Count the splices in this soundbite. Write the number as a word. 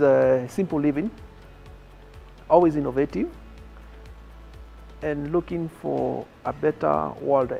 zero